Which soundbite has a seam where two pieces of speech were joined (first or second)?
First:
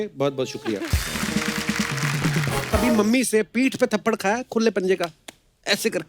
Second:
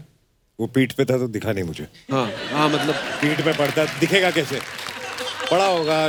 first